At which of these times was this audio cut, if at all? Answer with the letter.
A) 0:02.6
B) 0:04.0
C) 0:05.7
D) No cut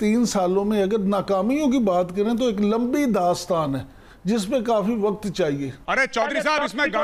C